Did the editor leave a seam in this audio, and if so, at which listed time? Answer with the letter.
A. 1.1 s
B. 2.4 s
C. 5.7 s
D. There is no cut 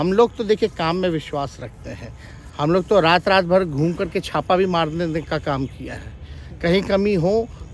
D